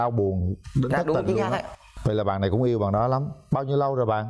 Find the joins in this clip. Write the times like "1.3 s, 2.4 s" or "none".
none